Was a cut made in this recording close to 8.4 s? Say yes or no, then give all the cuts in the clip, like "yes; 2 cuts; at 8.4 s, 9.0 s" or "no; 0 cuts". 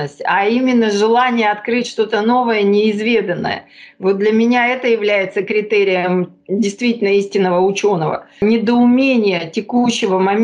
yes; 1 cut; at 8.4 s